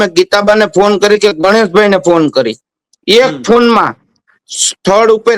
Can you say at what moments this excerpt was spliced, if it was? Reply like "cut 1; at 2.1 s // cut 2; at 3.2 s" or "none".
none